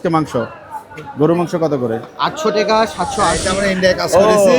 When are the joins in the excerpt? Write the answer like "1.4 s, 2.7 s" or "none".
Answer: 3.4 s